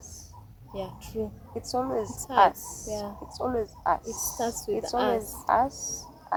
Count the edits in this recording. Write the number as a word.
zero